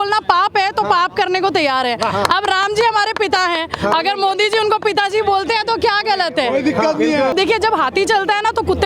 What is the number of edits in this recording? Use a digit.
1